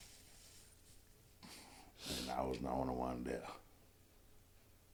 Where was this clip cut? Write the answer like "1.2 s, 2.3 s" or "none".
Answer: none